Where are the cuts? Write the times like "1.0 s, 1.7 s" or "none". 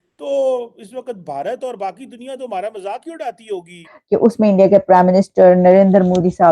3.9 s

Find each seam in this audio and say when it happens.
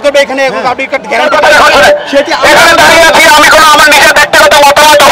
1.3 s

